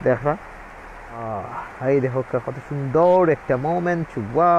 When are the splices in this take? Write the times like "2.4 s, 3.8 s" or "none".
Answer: 1.3 s